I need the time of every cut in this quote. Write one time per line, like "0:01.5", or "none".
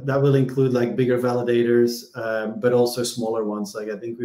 none